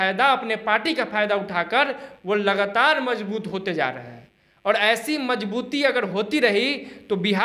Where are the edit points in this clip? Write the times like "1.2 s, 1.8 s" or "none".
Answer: none